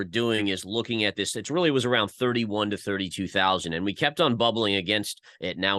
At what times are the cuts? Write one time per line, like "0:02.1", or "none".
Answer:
none